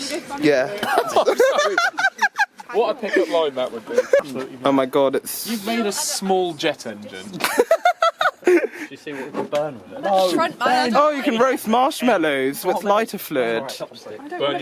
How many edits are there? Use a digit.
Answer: 1